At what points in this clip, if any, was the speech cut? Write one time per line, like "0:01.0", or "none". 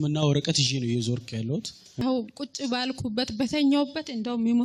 0:02.0